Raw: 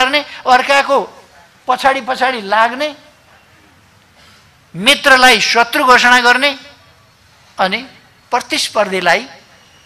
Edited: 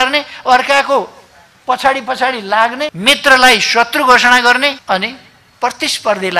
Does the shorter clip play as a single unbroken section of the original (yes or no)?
no